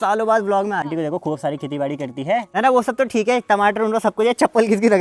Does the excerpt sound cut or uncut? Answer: cut